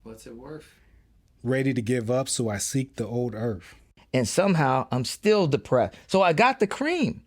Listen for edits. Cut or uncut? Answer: cut